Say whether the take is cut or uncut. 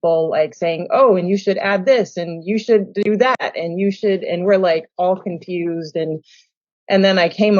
uncut